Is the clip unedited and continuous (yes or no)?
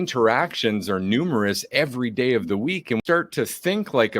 no